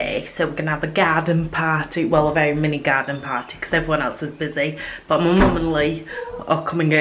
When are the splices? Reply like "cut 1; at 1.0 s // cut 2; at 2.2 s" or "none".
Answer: none